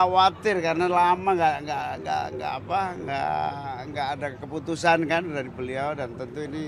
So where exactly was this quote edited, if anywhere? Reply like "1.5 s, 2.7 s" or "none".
none